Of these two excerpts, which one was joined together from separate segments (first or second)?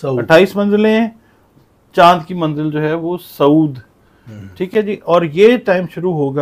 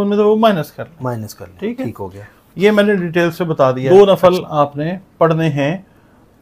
second